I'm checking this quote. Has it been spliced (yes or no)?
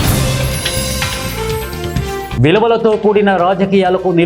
no